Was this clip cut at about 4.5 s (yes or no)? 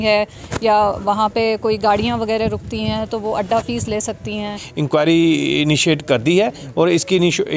yes